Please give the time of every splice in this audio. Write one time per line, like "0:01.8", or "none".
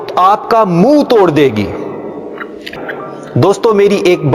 0:02.7